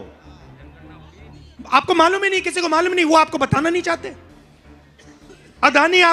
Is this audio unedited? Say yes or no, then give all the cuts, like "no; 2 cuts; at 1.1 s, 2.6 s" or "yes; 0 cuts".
yes; 0 cuts